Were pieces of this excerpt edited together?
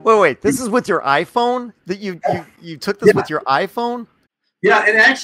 no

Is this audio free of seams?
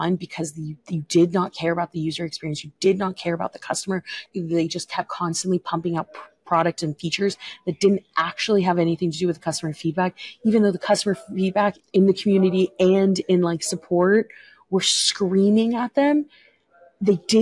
no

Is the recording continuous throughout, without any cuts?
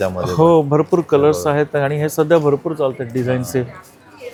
yes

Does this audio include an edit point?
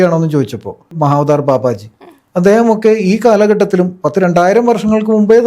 yes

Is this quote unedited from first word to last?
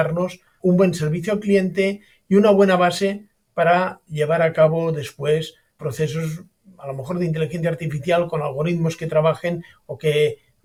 yes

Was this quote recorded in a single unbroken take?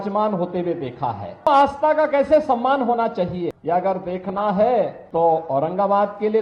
no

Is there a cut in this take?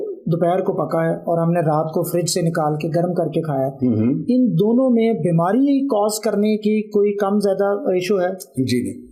no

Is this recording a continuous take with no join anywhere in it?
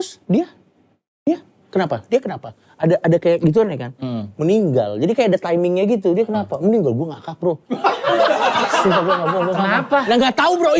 yes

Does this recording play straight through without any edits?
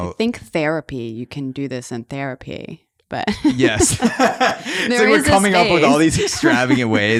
yes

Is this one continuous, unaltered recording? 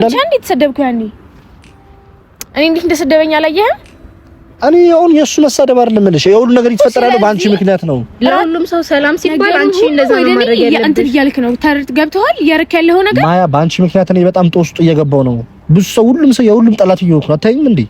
no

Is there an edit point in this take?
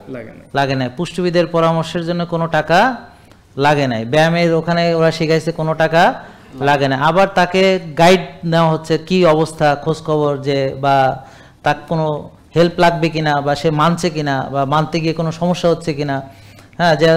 no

